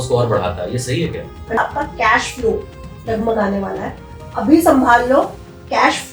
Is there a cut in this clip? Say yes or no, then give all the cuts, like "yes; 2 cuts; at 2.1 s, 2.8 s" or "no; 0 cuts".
yes; 1 cut; at 1.6 s